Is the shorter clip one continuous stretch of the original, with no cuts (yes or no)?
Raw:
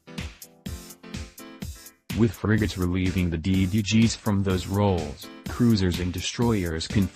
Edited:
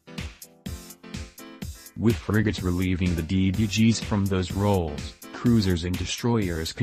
no